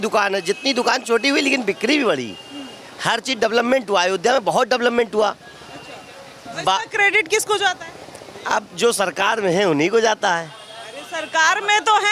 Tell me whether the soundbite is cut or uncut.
uncut